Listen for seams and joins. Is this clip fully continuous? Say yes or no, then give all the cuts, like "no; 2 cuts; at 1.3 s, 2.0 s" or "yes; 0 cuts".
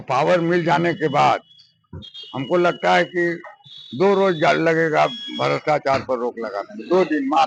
yes; 0 cuts